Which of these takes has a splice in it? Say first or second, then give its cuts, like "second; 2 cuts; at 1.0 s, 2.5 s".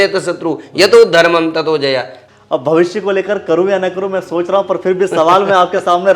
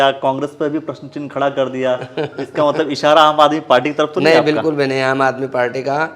first; 1 cut; at 2.2 s